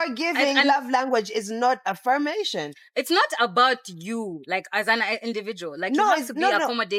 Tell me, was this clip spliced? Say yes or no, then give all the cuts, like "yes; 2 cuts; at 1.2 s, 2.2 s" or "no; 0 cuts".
no; 0 cuts